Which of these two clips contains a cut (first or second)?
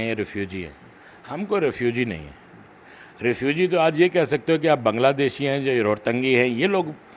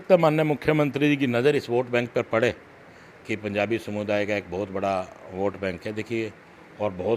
second